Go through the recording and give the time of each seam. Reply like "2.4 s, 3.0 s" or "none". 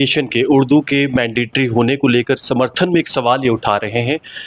none